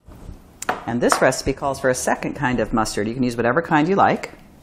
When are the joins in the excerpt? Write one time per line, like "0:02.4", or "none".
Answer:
0:02.7